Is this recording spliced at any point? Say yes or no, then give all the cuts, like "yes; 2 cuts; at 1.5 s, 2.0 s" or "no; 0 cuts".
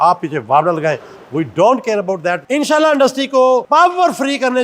yes; 1 cut; at 2.4 s